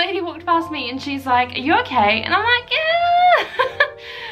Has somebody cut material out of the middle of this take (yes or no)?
no